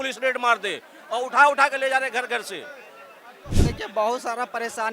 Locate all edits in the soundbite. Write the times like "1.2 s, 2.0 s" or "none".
3.5 s